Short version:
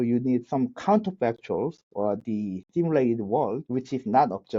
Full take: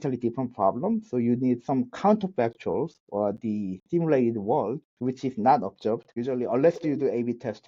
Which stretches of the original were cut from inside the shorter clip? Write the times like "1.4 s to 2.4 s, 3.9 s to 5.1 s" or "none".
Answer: 4.8 s to 4.9 s